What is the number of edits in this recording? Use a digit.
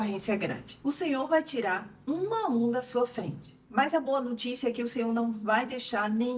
1